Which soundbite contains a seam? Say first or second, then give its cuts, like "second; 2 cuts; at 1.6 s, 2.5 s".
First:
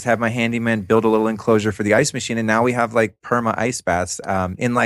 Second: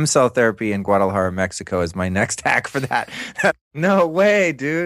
second; 1 cut; at 3.5 s